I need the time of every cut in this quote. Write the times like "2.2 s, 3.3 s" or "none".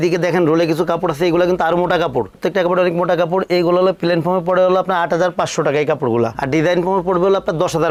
none